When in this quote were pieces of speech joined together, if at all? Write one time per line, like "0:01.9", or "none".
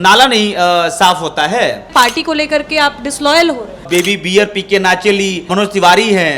0:01.8
0:03.8